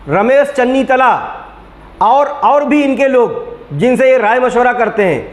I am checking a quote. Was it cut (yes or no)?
no